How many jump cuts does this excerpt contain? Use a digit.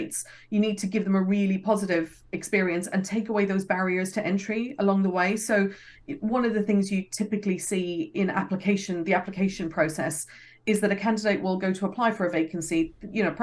0